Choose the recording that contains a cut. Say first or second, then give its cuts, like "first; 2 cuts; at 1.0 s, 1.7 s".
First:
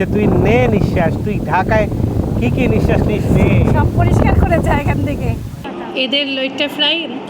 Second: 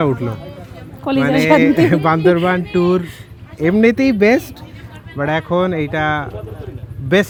first; 1 cut; at 5.6 s